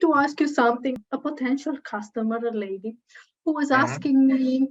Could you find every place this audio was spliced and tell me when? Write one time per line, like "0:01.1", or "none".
0:01.0